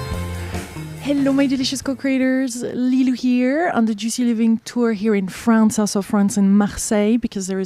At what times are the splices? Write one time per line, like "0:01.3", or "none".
none